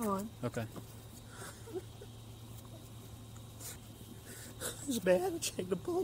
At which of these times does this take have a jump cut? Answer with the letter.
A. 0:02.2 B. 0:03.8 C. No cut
B